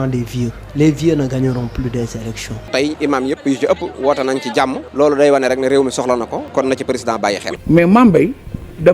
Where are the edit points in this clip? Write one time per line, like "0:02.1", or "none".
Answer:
0:02.7
0:07.5